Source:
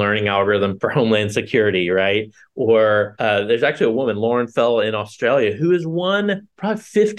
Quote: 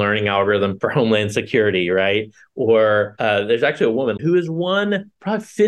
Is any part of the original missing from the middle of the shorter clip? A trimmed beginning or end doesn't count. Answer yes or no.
yes